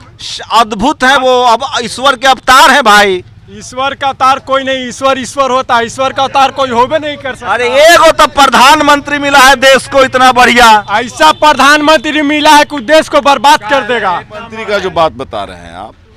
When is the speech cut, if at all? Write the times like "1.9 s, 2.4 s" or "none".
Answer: 14.6 s